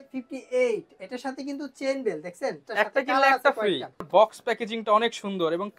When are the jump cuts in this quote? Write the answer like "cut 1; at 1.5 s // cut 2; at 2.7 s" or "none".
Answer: cut 1; at 2.7 s // cut 2; at 4.0 s